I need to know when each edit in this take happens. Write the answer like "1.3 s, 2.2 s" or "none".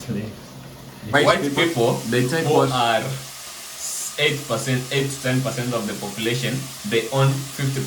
1.1 s